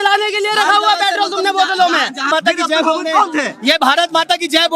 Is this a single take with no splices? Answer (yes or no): no